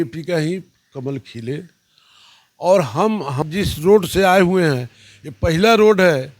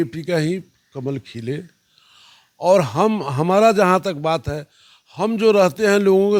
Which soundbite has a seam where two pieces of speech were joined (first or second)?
first